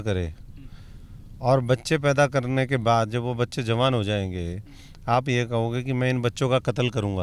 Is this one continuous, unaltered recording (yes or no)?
yes